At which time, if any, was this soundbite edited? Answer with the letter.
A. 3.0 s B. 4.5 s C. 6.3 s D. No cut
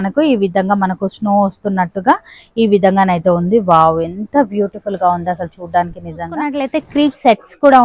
C